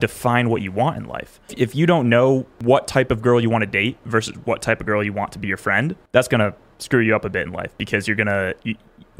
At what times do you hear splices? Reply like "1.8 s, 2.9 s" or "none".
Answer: 1.5 s, 2.5 s, 6.0 s

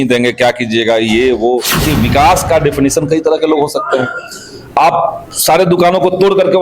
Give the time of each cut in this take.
1.8 s

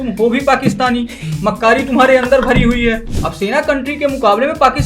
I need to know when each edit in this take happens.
3.1 s

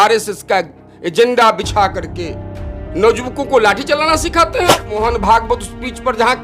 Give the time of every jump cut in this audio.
5.0 s

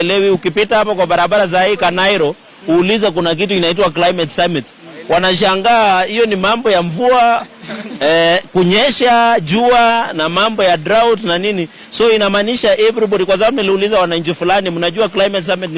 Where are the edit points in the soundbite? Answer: none

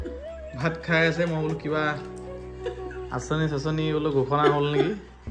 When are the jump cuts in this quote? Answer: none

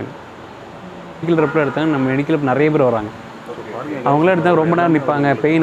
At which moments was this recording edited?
1.3 s

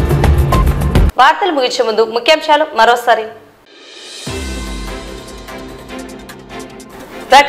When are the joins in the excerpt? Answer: none

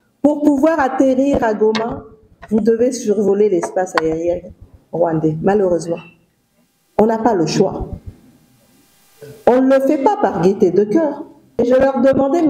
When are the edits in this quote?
11.6 s

